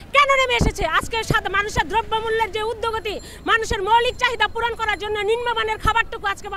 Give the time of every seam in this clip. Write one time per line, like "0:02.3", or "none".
none